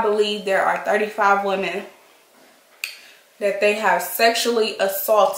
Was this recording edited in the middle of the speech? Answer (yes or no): no